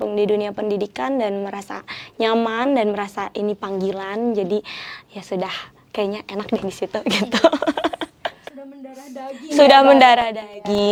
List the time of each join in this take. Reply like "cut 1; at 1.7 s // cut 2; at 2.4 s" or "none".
none